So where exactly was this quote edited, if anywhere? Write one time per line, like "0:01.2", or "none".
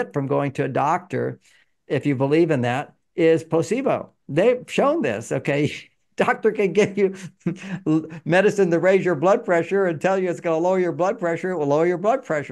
none